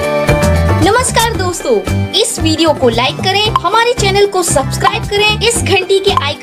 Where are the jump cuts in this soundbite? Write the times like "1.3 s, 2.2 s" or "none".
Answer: none